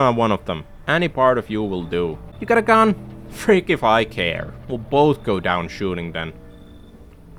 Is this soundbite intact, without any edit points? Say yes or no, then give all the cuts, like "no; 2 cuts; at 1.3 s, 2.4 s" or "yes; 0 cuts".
yes; 0 cuts